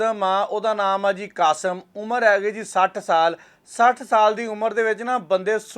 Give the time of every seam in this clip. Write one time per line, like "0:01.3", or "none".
none